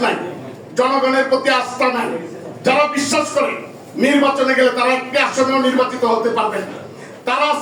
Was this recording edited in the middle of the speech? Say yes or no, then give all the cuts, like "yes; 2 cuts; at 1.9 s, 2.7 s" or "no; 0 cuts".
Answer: no; 0 cuts